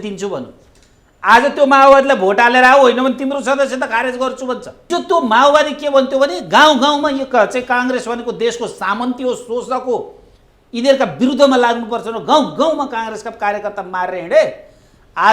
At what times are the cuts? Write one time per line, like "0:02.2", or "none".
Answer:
0:04.9